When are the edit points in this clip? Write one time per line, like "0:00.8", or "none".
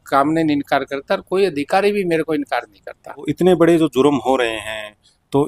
0:03.3

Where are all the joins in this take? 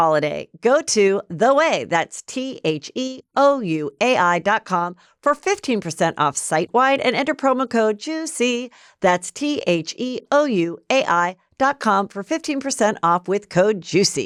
none

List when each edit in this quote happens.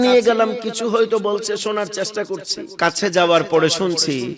0:02.6

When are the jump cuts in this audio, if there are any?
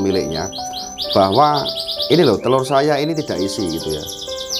none

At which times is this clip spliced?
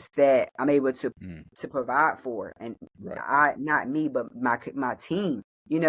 0:02.8

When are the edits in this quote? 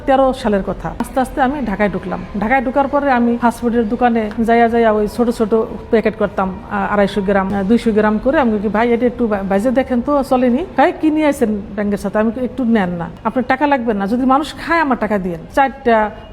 0:01.0
0:03.4
0:04.3
0:07.5
0:10.7
0:13.1
0:15.4

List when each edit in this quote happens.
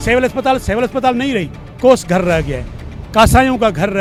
none

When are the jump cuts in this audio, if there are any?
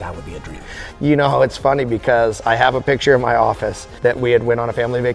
none

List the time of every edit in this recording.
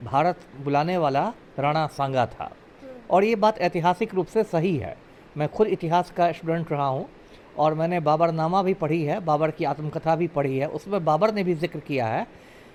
none

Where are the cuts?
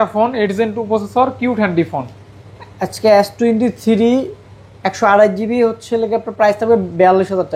none

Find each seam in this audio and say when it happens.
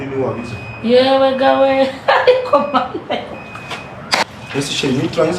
0:04.2

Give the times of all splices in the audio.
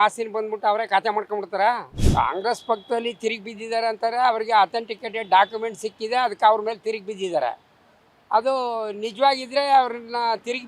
0:01.9

